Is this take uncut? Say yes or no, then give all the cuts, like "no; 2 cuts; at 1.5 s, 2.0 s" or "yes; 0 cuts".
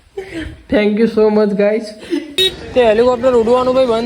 no; 1 cut; at 2.4 s